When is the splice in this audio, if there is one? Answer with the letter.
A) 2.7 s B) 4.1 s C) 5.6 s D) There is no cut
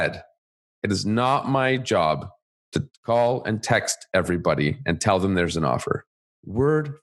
D